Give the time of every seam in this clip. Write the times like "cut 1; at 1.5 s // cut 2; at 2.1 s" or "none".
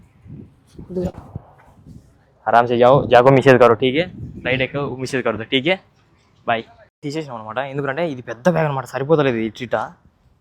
cut 1; at 6.8 s